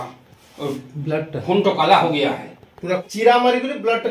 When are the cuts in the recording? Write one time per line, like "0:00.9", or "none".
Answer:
0:03.0